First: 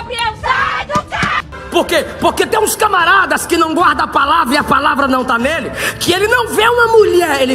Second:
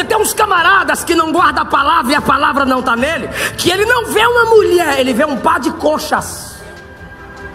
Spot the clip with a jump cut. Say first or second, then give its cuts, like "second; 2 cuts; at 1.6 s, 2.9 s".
first; 1 cut; at 1.4 s